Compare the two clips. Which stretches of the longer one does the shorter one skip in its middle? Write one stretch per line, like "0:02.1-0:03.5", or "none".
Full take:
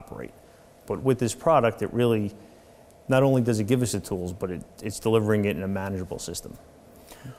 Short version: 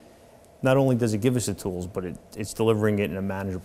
none